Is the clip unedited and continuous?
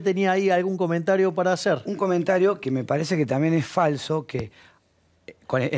yes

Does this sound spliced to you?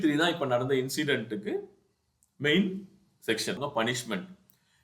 yes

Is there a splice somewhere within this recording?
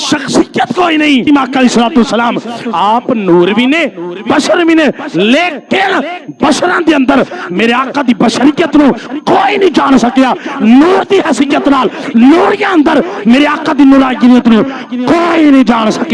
yes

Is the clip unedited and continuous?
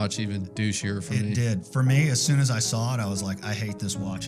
yes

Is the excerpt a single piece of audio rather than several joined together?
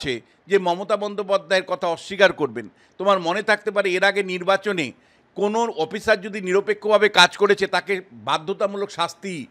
yes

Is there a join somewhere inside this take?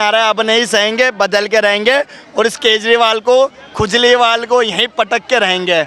no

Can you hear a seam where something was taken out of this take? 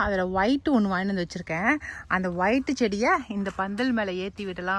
no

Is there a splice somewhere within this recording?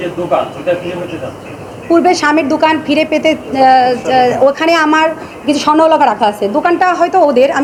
no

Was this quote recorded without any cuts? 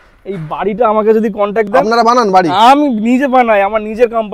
yes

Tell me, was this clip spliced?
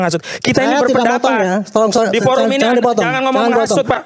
no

